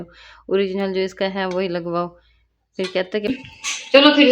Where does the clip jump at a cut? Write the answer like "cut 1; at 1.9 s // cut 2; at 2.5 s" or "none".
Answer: cut 1; at 3.4 s